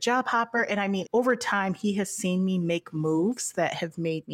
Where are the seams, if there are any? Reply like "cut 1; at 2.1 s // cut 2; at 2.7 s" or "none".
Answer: cut 1; at 1.0 s